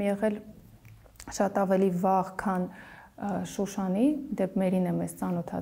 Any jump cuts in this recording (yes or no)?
no